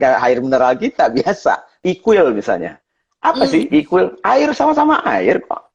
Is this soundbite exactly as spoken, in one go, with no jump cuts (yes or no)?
no